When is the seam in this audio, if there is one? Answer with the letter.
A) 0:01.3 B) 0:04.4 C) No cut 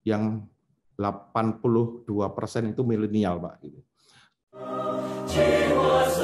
B